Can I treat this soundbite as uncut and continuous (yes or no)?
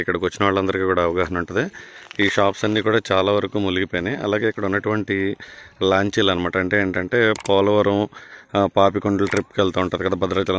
yes